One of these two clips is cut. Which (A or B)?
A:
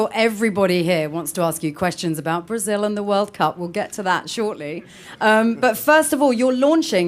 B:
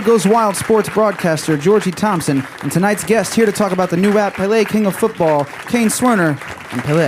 A